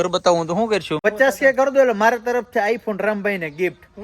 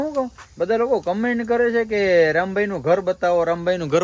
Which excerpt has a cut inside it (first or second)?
first